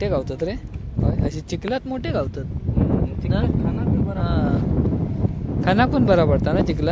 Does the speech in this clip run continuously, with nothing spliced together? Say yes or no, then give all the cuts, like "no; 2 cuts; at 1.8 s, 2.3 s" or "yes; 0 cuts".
yes; 0 cuts